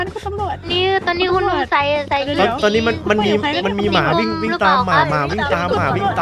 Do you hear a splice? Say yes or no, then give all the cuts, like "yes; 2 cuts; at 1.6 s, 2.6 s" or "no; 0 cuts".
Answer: no; 0 cuts